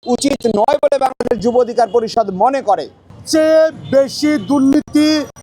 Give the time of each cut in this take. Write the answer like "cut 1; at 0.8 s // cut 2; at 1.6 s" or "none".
cut 1; at 3.1 s